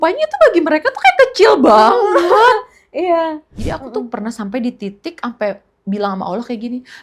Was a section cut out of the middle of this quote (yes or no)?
yes